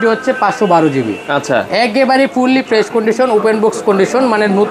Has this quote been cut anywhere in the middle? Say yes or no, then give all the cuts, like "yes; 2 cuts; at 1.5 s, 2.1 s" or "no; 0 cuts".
no; 0 cuts